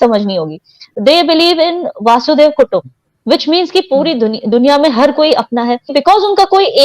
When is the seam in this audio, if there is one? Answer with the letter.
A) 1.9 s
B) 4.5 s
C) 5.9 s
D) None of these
C